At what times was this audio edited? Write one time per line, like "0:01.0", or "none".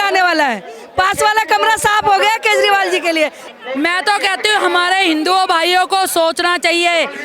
0:03.4